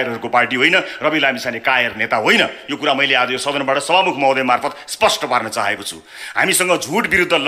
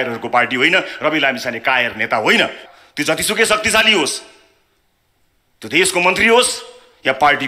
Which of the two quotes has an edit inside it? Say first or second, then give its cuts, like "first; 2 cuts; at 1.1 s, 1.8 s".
second; 1 cut; at 2.6 s